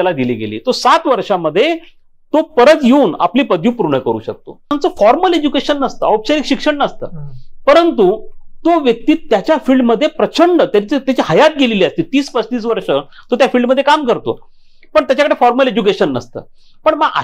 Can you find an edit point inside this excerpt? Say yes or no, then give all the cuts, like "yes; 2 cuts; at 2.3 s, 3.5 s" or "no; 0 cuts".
yes; 1 cut; at 4.7 s